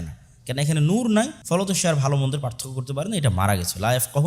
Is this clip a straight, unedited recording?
no; 1 cut; at 1.4 s

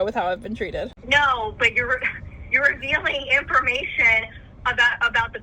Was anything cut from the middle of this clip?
yes; 1 cut; at 1.0 s

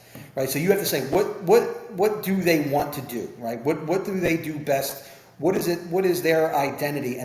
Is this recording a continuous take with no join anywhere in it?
yes; 0 cuts

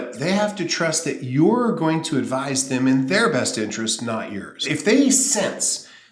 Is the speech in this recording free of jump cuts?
no; 1 cut; at 4.6 s

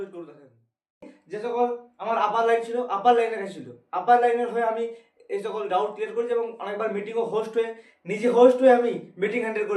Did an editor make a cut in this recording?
yes; 1 cut; at 1.2 s

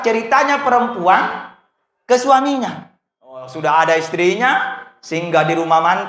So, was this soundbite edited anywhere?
yes; 1 cut; at 3.5 s

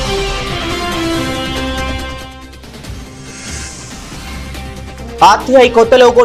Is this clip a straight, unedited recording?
yes; 0 cuts

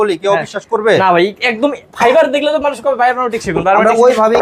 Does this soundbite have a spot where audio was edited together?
no; 0 cuts

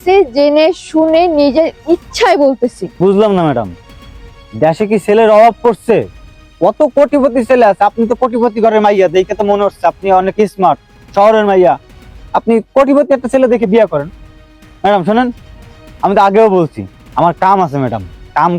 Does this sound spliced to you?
no; 0 cuts

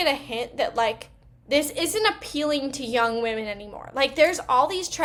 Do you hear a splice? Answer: no; 0 cuts

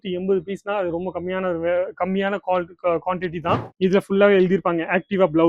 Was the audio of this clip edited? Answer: yes; 1 cut; at 3.7 s

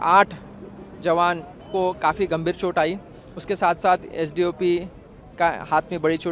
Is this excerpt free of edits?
yes; 0 cuts

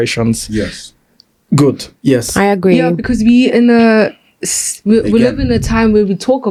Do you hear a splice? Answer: no; 0 cuts

